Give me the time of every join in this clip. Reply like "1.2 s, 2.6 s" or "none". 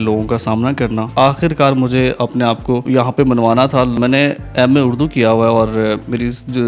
1.1 s, 2.8 s, 4.0 s